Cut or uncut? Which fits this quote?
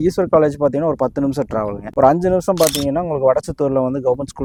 uncut